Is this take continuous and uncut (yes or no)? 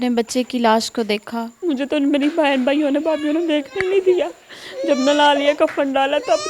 no